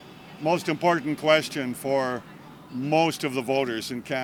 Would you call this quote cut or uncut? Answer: uncut